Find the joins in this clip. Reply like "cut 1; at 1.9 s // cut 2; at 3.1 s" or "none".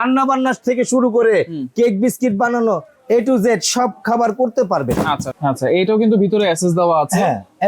cut 1; at 5.3 s